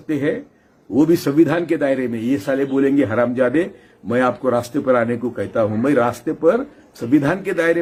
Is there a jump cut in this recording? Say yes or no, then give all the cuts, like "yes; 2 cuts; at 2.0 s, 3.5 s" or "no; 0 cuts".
no; 0 cuts